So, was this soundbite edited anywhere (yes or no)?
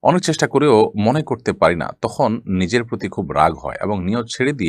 no